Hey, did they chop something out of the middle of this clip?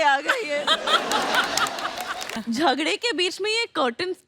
yes; 1 cut; at 2.3 s

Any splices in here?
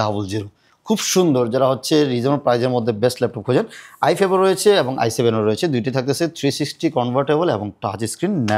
no; 0 cuts

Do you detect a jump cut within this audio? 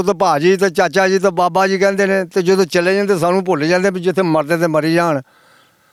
no; 0 cuts

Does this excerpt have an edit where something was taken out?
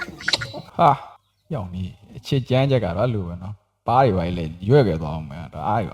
no; 0 cuts

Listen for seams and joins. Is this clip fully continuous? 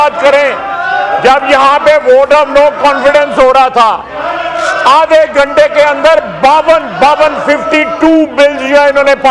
yes; 0 cuts

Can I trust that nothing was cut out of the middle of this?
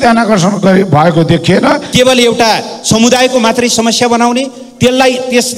no; 1 cut; at 1.9 s

